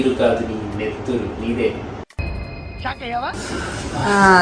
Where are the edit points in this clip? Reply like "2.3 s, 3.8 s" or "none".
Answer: 3.4 s